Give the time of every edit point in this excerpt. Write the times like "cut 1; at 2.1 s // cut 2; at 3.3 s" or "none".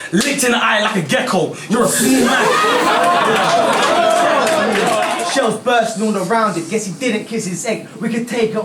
cut 1; at 5.2 s